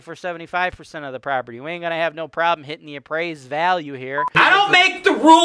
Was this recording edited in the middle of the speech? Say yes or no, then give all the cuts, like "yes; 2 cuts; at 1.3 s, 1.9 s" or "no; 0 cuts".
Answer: yes; 1 cut; at 4.3 s